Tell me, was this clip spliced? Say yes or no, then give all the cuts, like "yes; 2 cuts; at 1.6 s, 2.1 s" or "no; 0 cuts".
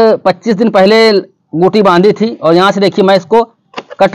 no; 0 cuts